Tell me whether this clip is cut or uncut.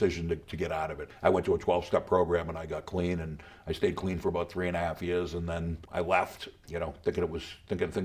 cut